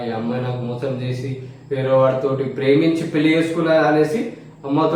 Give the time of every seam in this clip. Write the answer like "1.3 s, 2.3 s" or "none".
none